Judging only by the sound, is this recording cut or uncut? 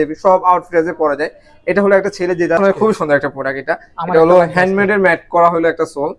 cut